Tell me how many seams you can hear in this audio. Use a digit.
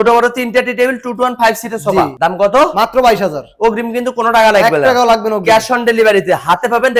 0